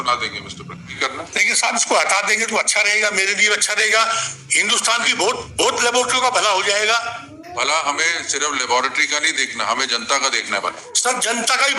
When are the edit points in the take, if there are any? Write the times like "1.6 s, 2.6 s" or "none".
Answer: 0.9 s